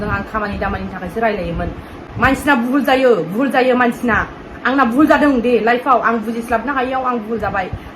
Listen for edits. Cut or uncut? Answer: cut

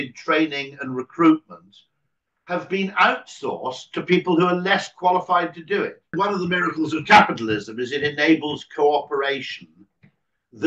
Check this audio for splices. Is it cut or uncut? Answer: cut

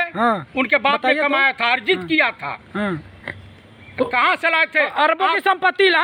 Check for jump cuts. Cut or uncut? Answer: uncut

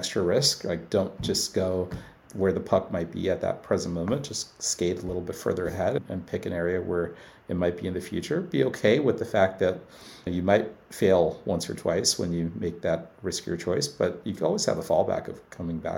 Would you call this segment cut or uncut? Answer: cut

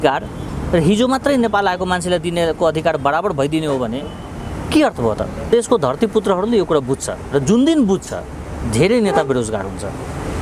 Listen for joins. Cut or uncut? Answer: cut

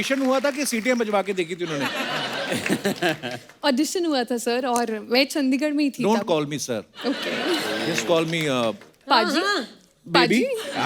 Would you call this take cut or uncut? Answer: uncut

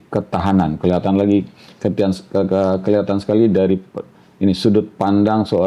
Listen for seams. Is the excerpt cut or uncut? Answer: uncut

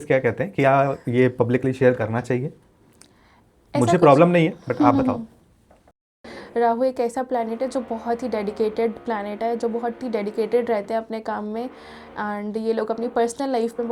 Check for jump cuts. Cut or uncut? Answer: cut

